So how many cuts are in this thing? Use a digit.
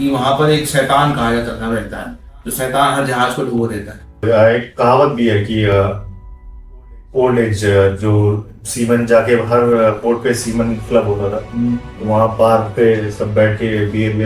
1